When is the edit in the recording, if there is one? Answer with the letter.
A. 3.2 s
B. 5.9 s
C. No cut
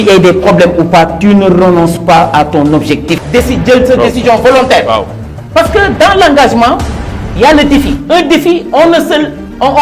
A